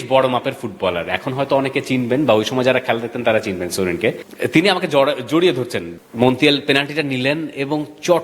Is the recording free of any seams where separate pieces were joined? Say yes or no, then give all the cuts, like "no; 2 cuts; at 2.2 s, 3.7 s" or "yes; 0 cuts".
no; 2 cuts; at 4.3 s, 5.9 s